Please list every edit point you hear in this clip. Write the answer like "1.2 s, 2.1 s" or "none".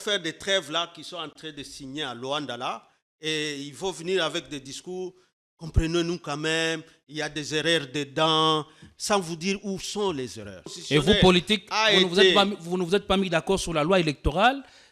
10.8 s